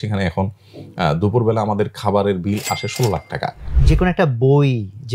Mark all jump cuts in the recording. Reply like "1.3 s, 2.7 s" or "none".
3.8 s